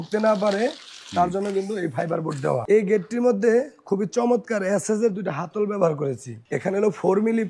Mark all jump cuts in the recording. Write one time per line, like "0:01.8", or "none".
0:02.6
0:06.3